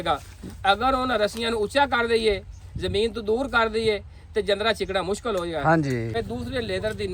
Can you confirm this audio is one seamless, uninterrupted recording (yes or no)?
no